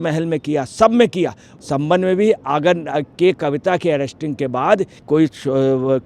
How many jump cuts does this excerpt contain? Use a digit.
2